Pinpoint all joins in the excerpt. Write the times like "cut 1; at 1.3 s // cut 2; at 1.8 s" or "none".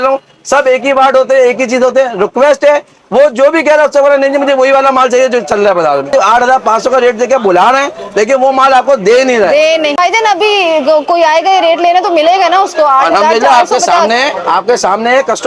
cut 1; at 6.1 s // cut 2; at 10.0 s